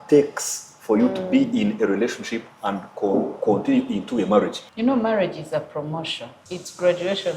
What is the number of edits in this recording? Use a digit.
2